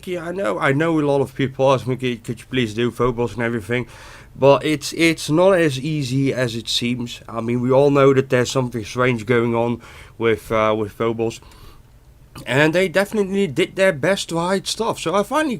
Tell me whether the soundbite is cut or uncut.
cut